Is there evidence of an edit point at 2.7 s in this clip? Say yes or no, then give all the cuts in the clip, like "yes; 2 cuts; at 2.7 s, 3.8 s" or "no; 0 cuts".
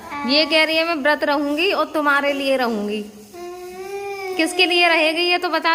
no; 0 cuts